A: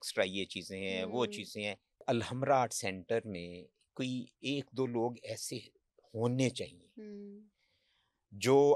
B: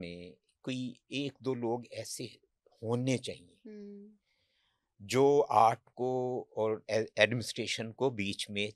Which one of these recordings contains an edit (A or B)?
A